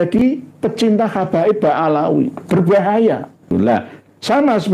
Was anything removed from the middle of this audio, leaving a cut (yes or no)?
yes